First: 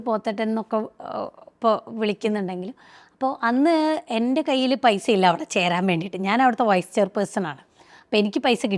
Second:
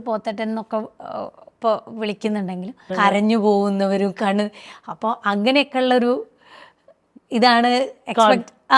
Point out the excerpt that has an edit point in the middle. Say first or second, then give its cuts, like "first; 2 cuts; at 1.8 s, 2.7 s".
second; 1 cut; at 2.9 s